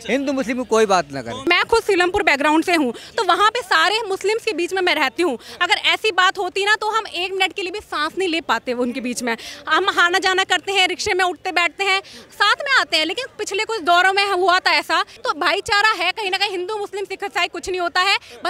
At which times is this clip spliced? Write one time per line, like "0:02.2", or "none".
0:01.4
0:15.1